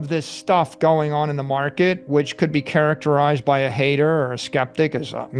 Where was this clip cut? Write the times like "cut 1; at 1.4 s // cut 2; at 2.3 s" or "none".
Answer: none